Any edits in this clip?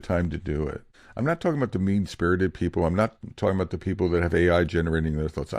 yes; 1 cut; at 1.0 s

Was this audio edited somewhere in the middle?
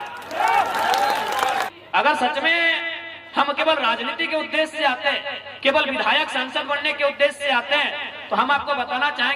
yes; 1 cut; at 1.7 s

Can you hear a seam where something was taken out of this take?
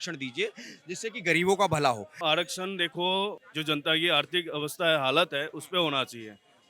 yes; 2 cuts; at 2.2 s, 3.4 s

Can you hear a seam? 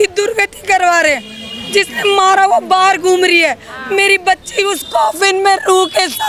no; 0 cuts

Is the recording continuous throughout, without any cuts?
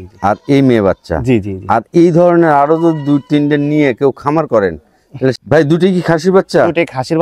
no; 1 cut; at 5.4 s

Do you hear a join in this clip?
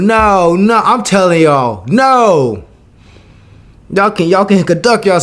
no; 0 cuts

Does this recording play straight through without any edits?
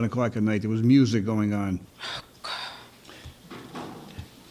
no; 1 cut; at 1.8 s

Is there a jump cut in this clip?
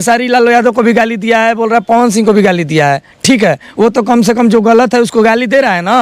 no; 0 cuts

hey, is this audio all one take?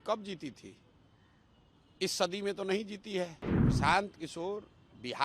no; 1 cut; at 3.5 s

